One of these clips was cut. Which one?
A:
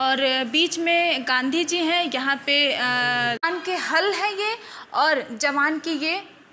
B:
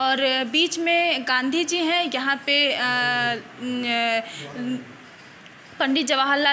A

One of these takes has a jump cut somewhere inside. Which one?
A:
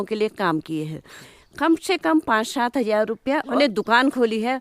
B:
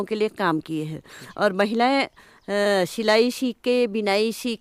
A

